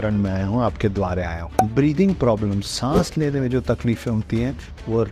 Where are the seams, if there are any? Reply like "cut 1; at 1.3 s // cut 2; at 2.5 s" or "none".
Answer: cut 1; at 1.4 s